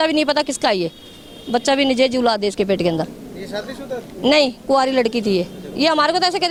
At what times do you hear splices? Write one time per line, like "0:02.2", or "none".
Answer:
none